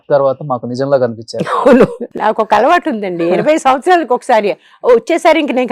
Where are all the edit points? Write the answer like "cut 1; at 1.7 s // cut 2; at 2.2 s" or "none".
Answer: cut 1; at 2.0 s